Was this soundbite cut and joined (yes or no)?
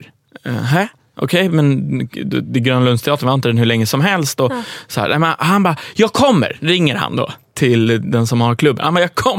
no